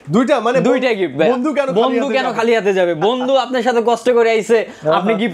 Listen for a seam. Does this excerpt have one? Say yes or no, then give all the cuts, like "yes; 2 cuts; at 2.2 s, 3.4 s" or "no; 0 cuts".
no; 0 cuts